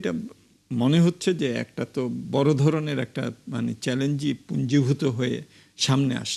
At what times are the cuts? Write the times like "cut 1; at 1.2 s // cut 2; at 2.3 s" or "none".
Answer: none